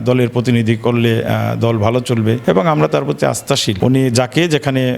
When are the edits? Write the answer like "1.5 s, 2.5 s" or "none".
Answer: 2.4 s, 3.7 s

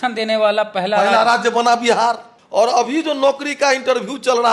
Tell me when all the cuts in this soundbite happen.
2.3 s

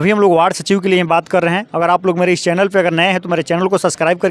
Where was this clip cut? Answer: none

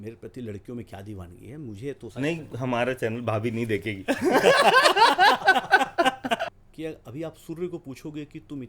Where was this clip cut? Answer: 6.5 s

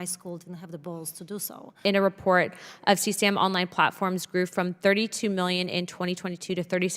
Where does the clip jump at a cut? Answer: 1.8 s

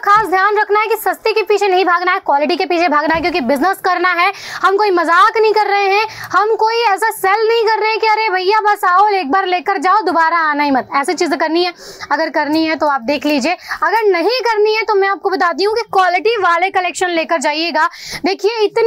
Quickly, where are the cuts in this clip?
none

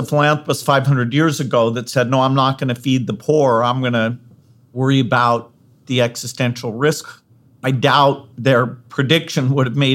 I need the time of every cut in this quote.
5.8 s, 7.0 s

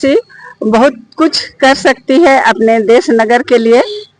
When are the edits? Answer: none

